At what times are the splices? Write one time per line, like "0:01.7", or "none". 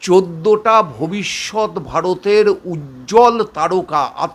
none